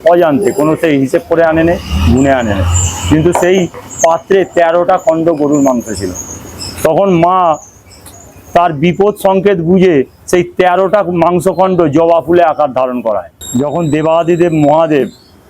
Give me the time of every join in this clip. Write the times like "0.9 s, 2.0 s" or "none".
13.4 s